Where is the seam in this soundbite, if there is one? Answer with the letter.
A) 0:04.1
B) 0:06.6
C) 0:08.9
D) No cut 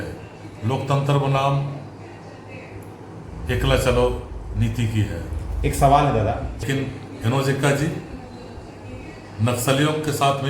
B